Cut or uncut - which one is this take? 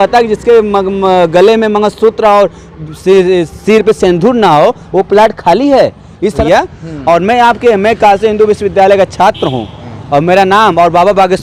uncut